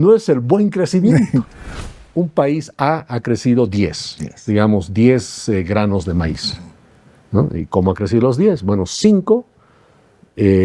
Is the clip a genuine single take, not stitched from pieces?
no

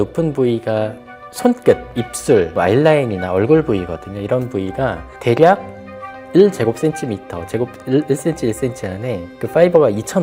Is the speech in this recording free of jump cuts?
yes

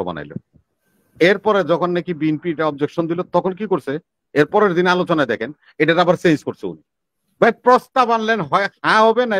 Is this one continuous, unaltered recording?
yes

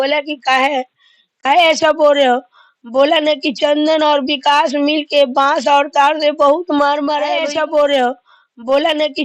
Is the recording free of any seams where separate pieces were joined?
no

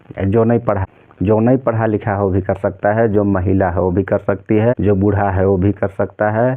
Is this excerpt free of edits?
no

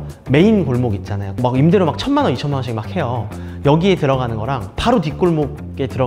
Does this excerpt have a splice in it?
no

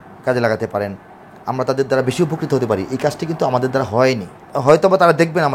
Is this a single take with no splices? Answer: no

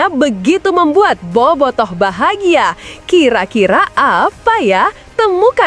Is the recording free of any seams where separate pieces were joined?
yes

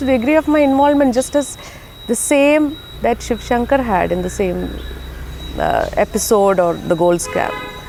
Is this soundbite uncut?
yes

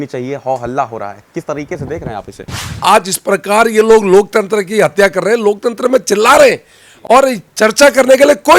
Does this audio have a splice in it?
yes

